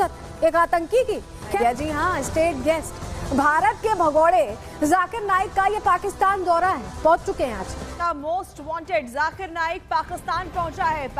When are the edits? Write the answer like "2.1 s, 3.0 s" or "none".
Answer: 1.5 s, 8.0 s